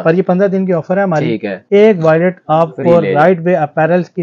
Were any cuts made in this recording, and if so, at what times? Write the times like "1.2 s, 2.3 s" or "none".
1.5 s